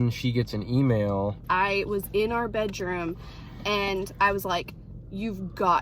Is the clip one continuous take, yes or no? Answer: no